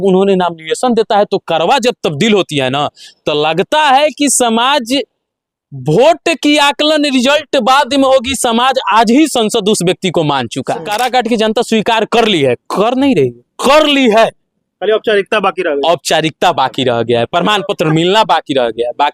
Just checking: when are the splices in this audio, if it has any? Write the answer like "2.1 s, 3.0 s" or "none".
10.9 s